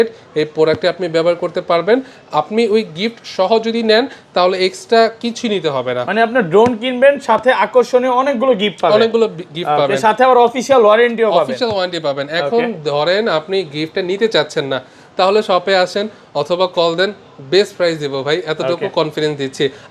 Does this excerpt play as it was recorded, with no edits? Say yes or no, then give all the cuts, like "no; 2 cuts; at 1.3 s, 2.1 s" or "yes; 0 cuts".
yes; 0 cuts